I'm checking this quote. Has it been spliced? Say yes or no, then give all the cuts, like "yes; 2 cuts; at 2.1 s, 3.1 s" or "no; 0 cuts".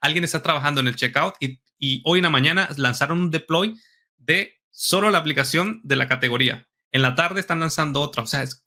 no; 0 cuts